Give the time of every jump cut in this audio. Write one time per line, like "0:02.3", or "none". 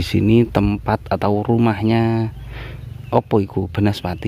none